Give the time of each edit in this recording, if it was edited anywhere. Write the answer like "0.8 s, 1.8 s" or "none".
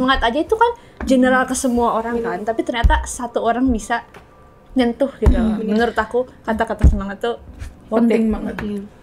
none